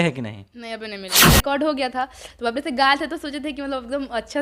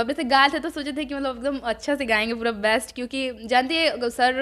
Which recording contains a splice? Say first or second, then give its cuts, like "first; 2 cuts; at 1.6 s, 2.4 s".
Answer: first; 1 cut; at 1.2 s